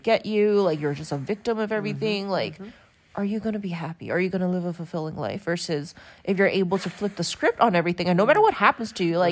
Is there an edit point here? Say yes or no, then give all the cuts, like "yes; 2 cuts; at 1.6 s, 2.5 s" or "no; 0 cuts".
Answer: no; 0 cuts